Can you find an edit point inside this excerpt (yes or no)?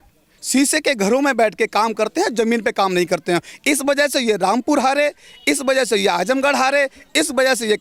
no